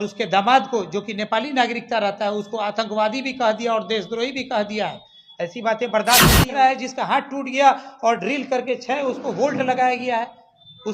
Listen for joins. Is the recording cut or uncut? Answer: cut